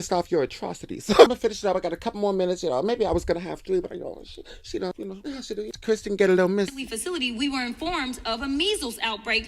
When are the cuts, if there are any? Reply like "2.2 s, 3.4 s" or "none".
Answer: 5.2 s, 6.8 s